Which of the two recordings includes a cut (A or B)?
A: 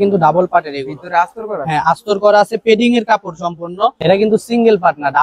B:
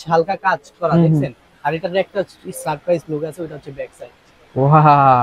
A